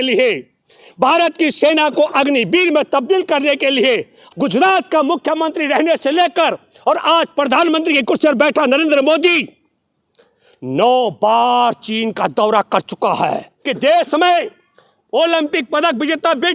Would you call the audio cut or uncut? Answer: cut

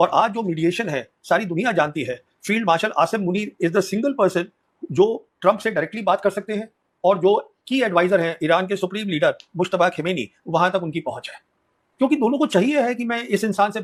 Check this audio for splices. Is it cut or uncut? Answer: uncut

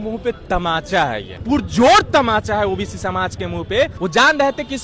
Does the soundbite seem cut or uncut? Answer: cut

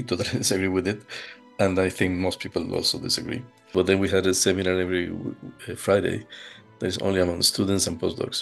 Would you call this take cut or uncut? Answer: cut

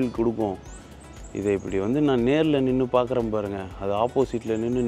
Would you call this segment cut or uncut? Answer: uncut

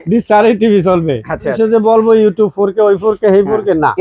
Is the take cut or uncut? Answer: cut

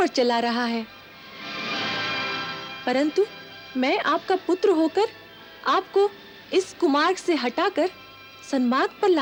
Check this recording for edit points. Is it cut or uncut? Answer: uncut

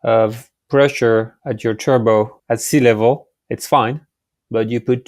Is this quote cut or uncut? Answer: cut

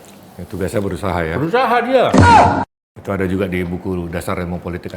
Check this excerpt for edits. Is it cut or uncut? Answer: cut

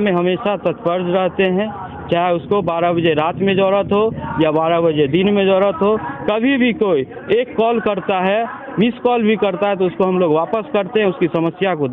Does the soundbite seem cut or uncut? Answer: uncut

